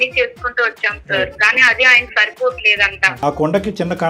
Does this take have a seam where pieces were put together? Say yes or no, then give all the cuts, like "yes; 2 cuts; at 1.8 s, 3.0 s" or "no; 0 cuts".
yes; 1 cut; at 3.2 s